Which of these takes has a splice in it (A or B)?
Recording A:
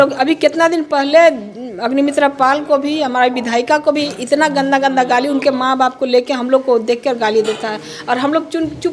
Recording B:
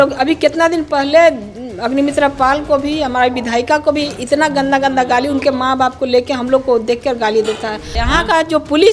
B